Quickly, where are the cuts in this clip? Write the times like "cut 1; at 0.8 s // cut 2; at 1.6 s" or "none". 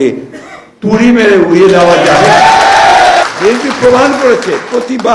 cut 1; at 3.2 s